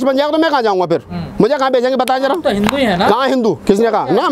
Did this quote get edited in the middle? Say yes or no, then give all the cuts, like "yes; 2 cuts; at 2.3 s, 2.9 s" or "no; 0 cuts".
no; 0 cuts